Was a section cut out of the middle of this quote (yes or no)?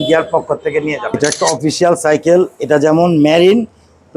yes